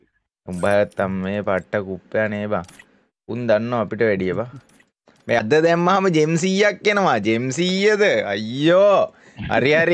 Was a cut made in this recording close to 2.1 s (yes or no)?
no